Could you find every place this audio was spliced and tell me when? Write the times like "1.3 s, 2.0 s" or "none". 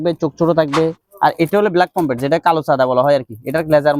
1.0 s